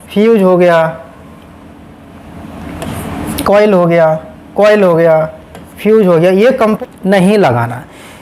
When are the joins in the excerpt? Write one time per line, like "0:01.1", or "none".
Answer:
0:06.8